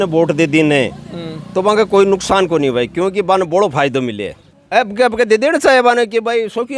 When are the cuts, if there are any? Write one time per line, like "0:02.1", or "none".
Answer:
none